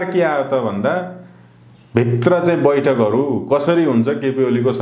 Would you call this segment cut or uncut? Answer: uncut